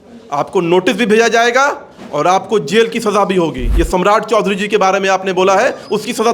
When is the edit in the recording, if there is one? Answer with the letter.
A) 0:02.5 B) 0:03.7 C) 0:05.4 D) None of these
B